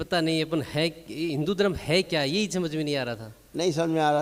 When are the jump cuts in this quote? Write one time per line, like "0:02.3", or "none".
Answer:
none